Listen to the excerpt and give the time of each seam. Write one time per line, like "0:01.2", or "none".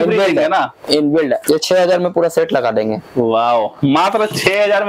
0:01.4